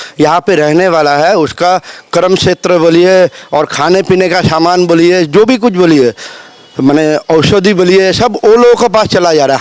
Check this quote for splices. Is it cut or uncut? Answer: uncut